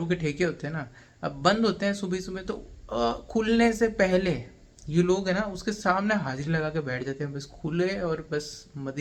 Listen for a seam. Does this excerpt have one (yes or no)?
no